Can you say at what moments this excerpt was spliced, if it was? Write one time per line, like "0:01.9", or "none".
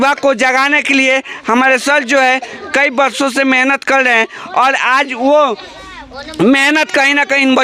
none